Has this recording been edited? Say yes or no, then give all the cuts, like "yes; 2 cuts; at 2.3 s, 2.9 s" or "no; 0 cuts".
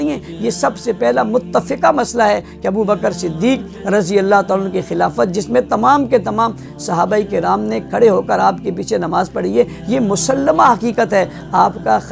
no; 0 cuts